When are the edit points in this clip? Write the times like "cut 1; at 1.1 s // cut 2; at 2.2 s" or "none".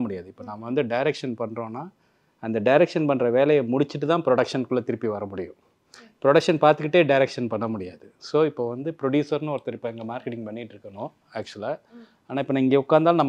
none